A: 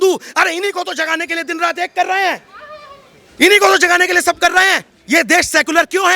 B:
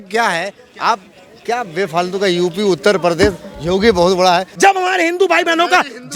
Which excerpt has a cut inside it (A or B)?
A